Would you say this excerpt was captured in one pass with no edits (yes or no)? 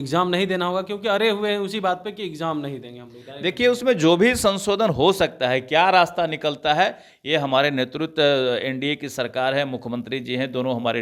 yes